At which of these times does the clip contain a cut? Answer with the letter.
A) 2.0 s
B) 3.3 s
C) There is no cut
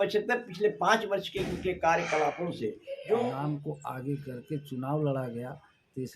B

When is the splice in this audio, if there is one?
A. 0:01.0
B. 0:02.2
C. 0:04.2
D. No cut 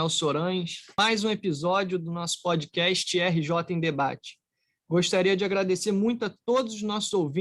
A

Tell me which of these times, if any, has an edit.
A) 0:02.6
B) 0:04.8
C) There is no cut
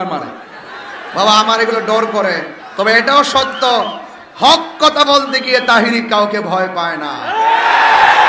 A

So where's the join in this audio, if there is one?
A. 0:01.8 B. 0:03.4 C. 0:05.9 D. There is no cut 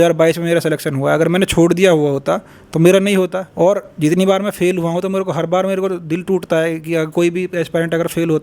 B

